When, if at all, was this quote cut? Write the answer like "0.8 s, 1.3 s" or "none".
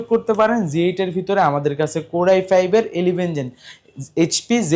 none